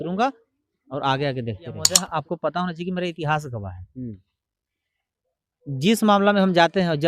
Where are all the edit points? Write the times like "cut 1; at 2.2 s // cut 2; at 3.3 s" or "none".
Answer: cut 1; at 1.9 s